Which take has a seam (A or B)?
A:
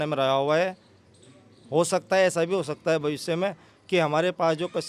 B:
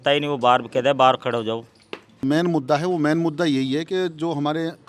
B